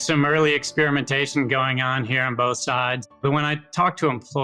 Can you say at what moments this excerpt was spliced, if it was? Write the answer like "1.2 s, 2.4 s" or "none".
none

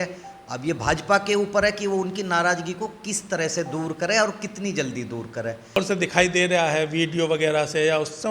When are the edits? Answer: 5.8 s

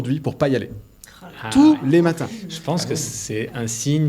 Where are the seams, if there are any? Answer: none

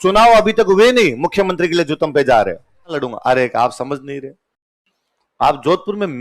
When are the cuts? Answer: 3.1 s

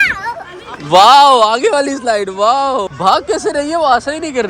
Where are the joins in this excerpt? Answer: 2.9 s

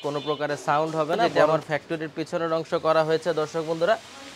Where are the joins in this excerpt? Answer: 1.5 s

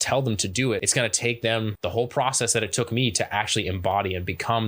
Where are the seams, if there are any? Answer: 0.9 s, 1.7 s

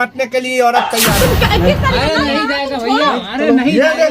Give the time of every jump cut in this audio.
1.1 s

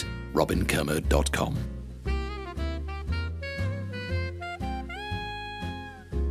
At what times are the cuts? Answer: 1.6 s

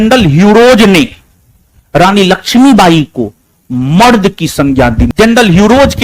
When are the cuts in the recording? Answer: 5.1 s

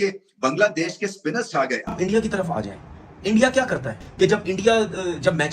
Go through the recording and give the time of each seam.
1.8 s, 3.9 s

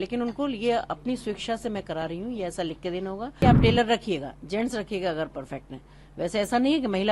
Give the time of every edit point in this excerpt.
3.4 s

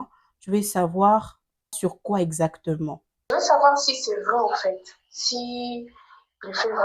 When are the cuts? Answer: 1.7 s, 3.3 s

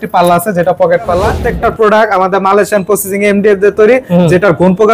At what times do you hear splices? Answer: 1.4 s

